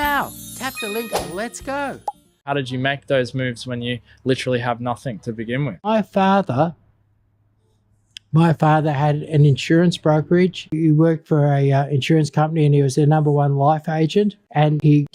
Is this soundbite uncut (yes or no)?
no